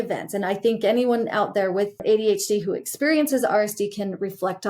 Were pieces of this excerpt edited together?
yes; 1 cut; at 2.0 s

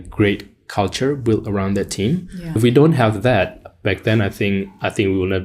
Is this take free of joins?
no; 1 cut; at 2.6 s

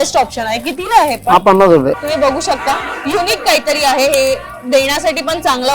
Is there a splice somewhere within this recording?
yes; 1 cut; at 2.0 s

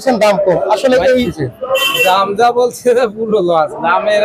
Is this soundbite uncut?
no; 1 cut; at 1.4 s

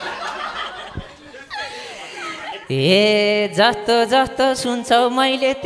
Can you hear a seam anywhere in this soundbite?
no; 0 cuts

